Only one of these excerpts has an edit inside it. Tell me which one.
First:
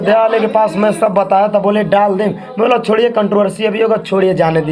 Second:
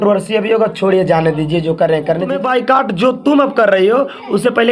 second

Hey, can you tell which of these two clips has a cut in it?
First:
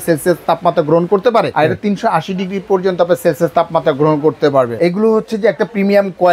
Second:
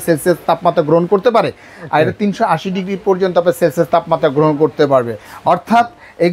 first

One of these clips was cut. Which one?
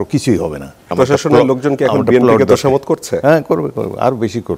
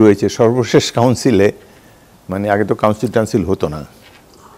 first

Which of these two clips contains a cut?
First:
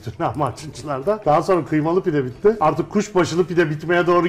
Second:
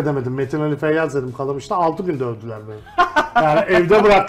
first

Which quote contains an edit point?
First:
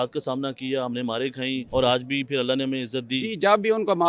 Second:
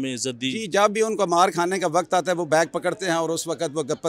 first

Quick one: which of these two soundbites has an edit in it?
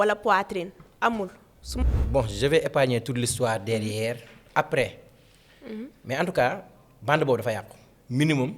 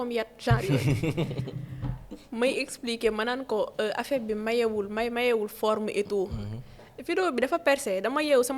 first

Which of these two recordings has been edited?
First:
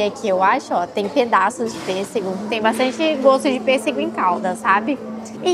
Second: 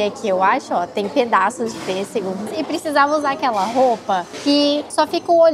second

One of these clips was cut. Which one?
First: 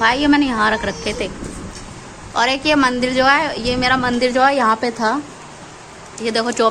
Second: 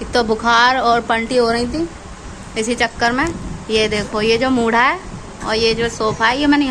first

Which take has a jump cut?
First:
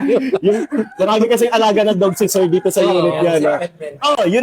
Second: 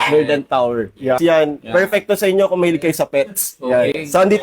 second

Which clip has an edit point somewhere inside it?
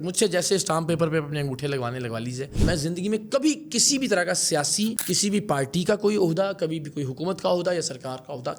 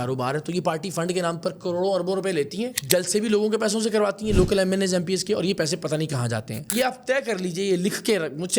second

